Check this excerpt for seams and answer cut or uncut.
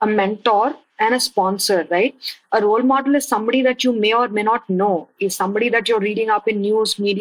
uncut